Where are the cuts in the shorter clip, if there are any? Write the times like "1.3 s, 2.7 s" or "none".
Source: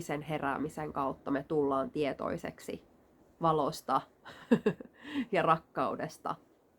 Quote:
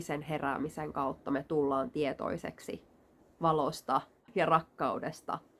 4.3 s